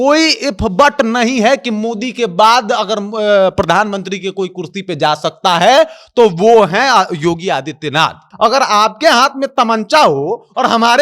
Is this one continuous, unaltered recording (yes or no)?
no